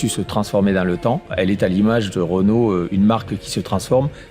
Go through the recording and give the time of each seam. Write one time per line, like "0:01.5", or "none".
0:01.3